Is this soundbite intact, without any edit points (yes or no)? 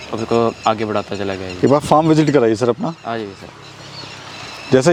yes